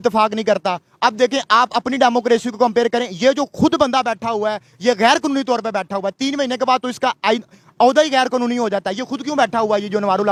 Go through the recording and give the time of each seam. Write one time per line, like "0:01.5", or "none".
none